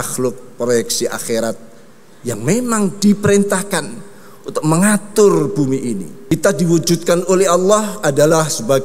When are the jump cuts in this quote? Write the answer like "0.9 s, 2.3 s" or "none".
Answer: 6.2 s